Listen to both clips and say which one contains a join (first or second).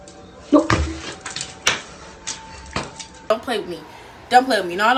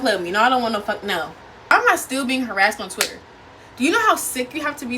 second